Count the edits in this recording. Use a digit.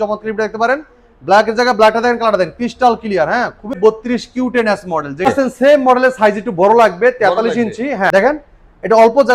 3